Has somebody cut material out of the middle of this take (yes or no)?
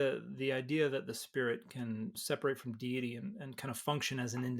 yes